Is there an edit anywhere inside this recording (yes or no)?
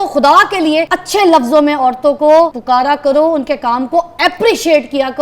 yes